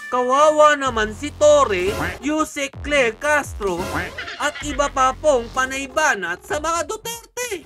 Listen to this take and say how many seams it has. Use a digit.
0